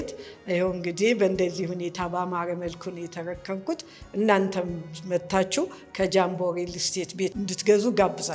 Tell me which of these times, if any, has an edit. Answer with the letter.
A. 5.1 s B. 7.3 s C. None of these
B